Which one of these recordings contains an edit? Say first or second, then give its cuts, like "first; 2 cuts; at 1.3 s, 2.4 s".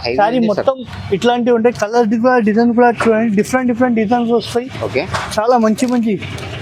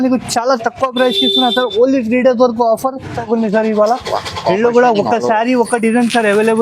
second; 1 cut; at 3.2 s